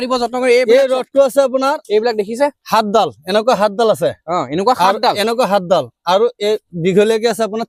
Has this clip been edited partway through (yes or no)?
no